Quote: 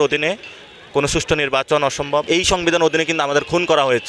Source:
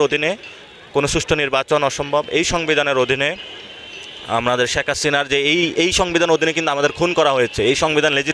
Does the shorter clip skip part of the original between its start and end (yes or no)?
yes